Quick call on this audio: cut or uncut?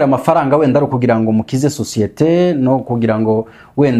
uncut